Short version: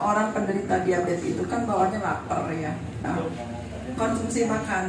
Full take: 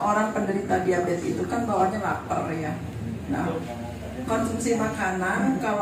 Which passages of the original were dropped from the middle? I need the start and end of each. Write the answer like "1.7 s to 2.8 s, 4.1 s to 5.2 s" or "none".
3.1 s to 3.4 s

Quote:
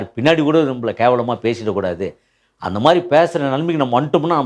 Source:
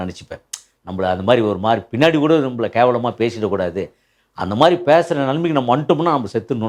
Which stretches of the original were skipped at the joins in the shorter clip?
none

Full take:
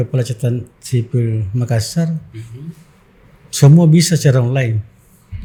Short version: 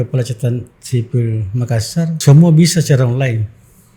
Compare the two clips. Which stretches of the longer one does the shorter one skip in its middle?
2.2 s to 3.5 s

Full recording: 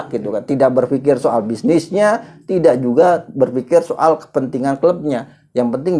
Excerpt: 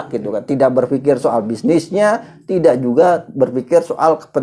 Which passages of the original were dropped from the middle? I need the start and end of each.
none

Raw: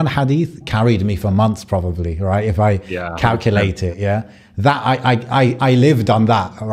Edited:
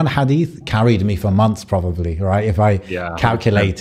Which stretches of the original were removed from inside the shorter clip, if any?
none

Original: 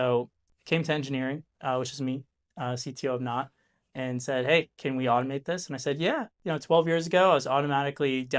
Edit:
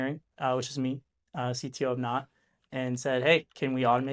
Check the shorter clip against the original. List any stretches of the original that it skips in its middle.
none

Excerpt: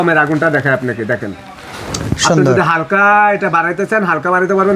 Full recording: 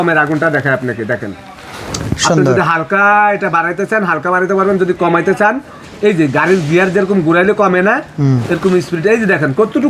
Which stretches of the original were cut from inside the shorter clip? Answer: none

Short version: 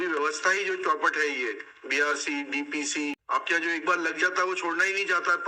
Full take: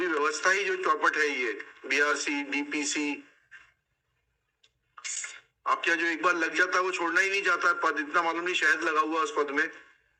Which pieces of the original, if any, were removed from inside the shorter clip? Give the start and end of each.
3.2 s to 5.6 s

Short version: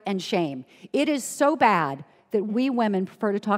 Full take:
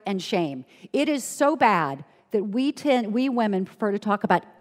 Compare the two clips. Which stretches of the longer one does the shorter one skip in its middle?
2.5 s to 3.1 s

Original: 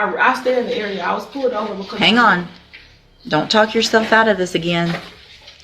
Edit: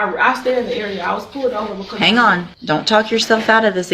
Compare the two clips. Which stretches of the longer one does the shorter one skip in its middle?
2.5 s to 3.2 s

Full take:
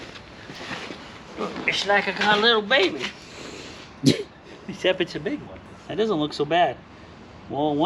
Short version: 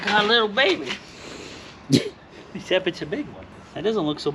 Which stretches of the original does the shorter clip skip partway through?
none

